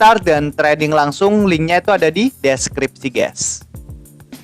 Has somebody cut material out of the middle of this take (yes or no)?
yes